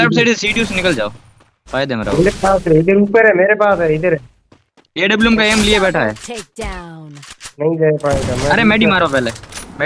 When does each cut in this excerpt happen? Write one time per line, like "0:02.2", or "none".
none